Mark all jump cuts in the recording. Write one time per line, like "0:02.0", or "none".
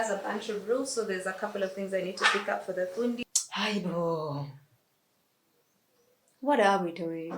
0:03.2